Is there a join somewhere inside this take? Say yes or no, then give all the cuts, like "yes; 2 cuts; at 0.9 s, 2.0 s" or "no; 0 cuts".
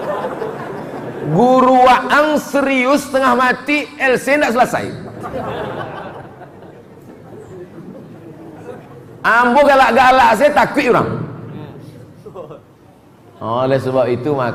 no; 0 cuts